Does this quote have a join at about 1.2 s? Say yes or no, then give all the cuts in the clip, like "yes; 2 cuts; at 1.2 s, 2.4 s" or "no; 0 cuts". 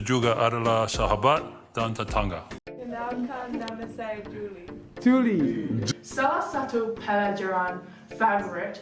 no; 1 cut; at 2.6 s